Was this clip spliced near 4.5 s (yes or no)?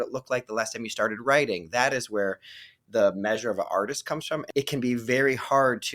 yes